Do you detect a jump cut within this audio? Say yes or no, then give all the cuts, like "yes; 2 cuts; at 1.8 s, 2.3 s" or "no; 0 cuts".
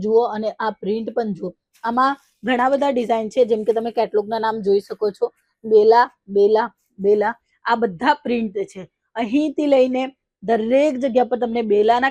no; 0 cuts